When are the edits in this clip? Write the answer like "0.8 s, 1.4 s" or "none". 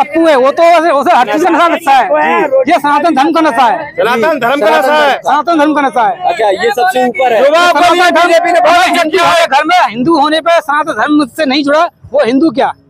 none